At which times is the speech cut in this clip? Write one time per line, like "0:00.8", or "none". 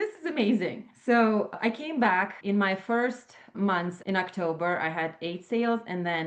0:00.9
0:01.5
0:02.4
0:03.5